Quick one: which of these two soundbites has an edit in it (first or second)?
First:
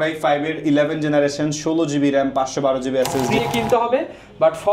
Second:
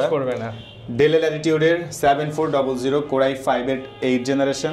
first